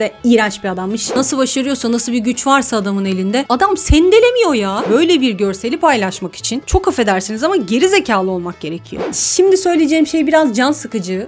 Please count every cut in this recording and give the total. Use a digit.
3